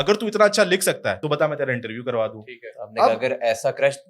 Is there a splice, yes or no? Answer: yes